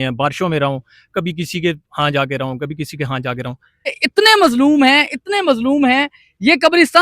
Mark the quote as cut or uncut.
cut